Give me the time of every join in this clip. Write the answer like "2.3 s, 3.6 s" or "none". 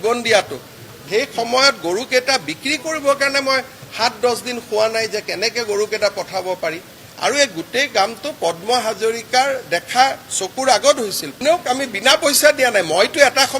0.9 s, 11.3 s